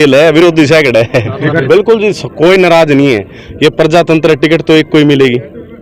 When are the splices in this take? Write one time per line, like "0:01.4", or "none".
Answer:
0:01.6